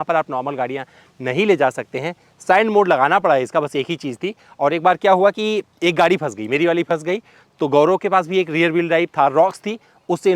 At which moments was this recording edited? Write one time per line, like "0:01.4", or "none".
none